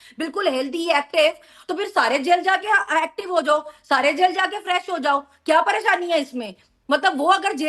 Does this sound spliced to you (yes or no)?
no